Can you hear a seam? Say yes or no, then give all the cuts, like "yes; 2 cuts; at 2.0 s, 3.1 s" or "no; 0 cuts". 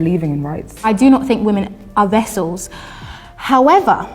no; 0 cuts